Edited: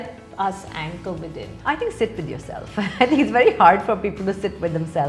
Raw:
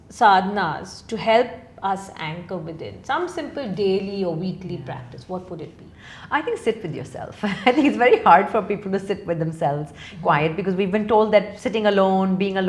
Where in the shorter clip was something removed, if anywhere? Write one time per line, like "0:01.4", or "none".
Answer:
0:01.5